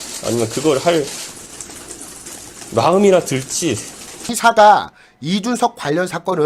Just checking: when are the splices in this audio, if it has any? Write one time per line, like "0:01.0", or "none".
0:04.3